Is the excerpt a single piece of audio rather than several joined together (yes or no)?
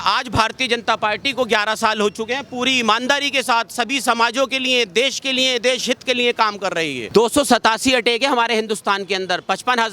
yes